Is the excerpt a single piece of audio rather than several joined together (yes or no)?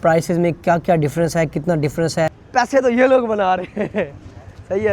no